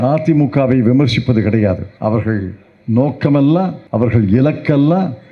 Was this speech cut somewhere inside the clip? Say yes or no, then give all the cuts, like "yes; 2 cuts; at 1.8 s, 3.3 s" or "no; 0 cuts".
yes; 2 cuts; at 1.9 s, 3.8 s